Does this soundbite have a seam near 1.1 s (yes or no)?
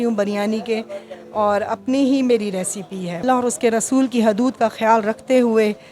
no